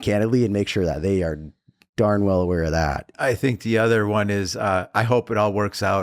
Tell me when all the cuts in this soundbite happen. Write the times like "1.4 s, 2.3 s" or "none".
3.1 s